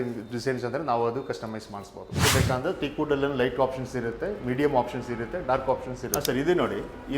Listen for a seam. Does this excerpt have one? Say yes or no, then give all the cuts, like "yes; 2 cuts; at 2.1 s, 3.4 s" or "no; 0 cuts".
yes; 2 cuts; at 2.3 s, 6.1 s